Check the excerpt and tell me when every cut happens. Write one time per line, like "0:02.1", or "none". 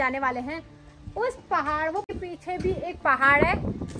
0:02.1